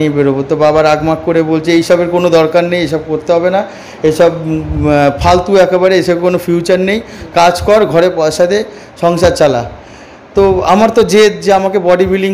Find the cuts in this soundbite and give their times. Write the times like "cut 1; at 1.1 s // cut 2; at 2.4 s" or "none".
none